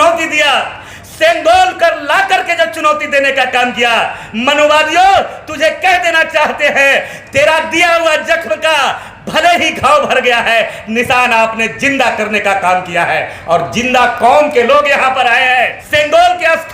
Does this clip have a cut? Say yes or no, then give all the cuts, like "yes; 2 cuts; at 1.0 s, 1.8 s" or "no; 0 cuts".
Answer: yes; 1 cut; at 15.8 s